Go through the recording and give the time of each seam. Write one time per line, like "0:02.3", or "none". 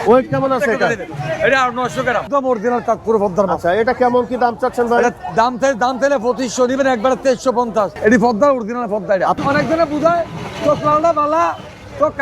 0:02.2
0:07.9
0:09.4

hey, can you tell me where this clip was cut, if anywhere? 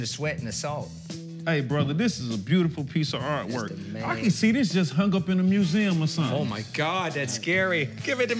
none

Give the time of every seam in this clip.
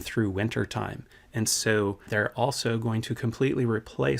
0:02.1

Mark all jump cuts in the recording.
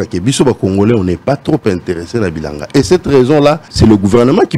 0:03.7

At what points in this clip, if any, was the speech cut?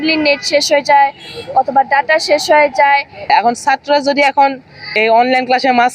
0:03.3
0:05.0

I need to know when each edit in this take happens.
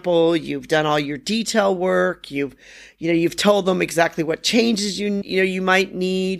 0:05.2

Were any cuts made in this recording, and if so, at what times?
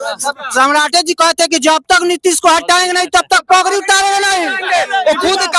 none

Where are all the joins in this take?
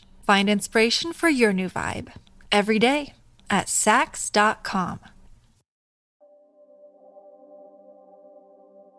0:06.1
0:08.0

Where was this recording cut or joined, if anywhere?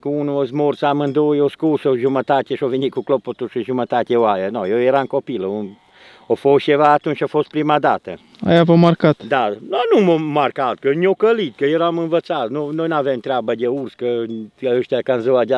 none

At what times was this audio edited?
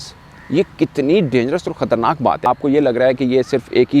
0:02.5

